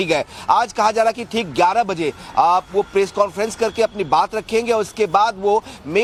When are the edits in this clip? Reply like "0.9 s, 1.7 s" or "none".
none